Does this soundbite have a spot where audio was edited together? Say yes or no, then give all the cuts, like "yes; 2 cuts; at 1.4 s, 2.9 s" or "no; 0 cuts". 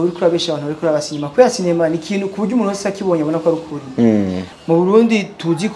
yes; 1 cut; at 4.5 s